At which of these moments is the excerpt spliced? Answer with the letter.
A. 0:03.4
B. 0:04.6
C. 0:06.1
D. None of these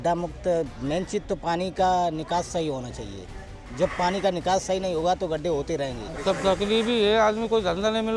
C